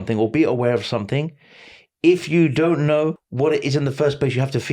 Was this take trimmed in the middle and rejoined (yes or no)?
yes